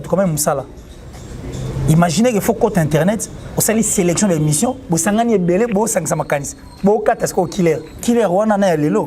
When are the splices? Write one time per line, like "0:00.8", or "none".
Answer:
0:07.9